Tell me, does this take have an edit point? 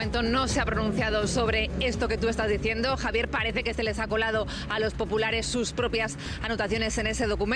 no; 0 cuts

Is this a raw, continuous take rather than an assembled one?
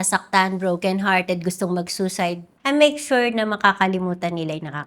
no; 1 cut; at 2.5 s

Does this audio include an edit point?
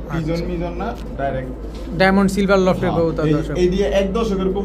no; 0 cuts

